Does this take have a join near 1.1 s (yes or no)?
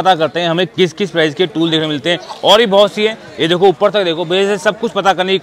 no